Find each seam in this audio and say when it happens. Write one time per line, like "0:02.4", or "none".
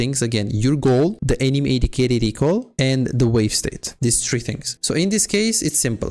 0:01.2
0:03.9
0:04.7